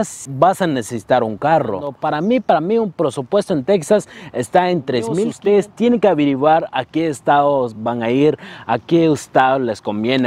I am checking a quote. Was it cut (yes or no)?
yes